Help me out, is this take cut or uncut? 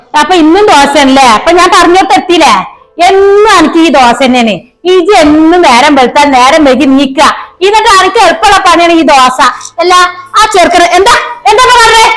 uncut